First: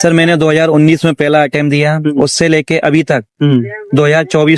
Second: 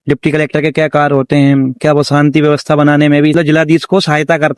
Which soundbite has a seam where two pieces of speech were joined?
second; 1 cut; at 3.3 s

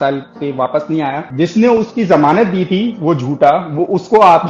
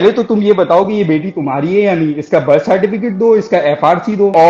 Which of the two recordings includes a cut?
first; 1 cut; at 1.2 s

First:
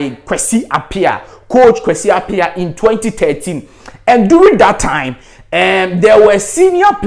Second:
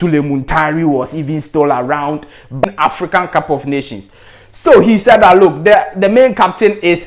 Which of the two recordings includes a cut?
second; 1 cut; at 2.6 s

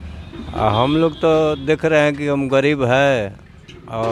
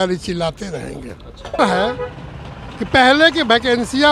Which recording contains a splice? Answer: second; 1 cut; at 1.6 s

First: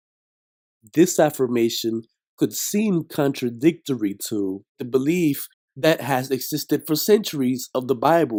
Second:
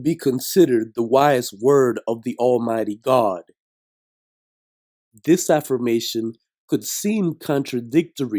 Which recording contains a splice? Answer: second; 1 cut; at 2.5 s

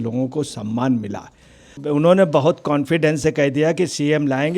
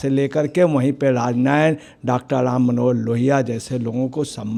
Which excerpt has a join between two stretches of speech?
first; 1 cut; at 1.8 s

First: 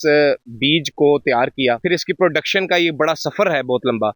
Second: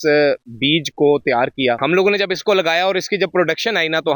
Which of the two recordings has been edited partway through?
second; 1 cut; at 1.8 s

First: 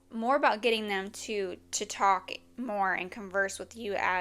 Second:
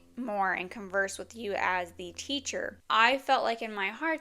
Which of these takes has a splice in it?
second; 1 cut; at 2.8 s

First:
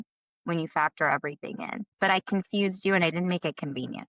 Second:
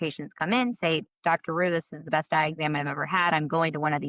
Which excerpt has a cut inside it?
first; 1 cut; at 1.8 s

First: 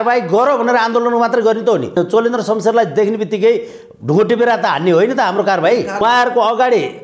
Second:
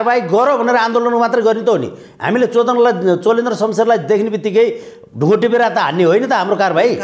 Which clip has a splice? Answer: first; 2 cuts; at 2.0 s, 6.0 s

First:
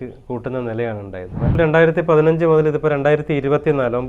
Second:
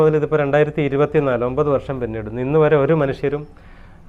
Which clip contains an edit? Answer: first; 1 cut; at 1.5 s

